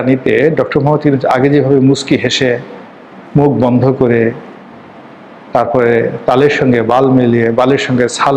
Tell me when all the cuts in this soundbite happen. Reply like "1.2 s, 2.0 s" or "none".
none